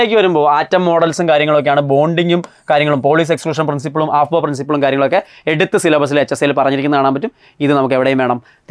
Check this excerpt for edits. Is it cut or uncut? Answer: uncut